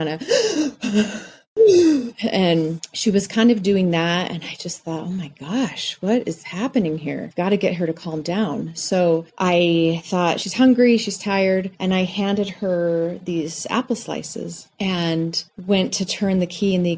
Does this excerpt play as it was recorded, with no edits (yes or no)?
yes